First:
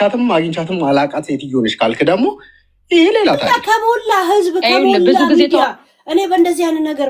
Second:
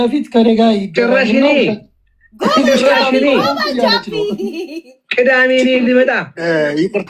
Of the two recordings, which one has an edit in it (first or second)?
first